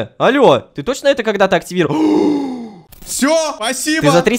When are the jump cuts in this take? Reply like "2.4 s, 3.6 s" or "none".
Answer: 2.7 s, 3.6 s